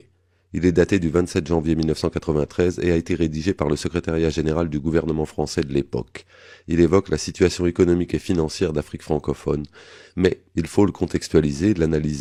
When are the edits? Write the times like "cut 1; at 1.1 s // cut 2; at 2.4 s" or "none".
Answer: none